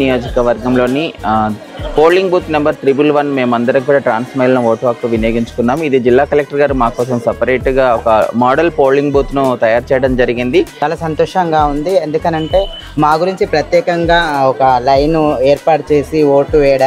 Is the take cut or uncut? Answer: cut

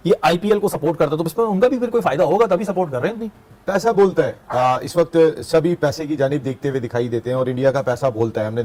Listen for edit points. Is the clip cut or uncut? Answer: uncut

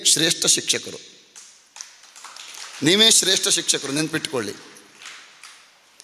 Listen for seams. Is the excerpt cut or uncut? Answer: uncut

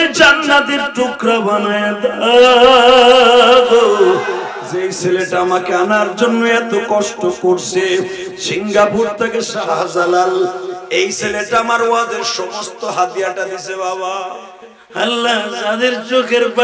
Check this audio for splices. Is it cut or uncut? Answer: cut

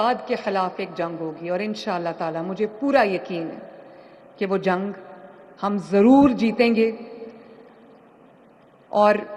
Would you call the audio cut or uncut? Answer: uncut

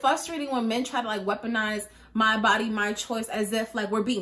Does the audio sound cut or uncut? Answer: uncut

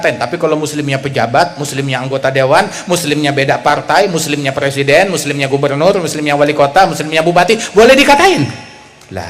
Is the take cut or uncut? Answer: uncut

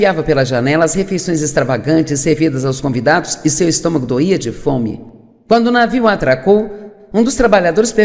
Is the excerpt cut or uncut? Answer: cut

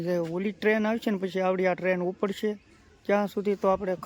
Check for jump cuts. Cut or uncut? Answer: uncut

